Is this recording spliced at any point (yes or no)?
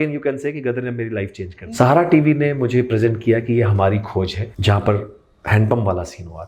yes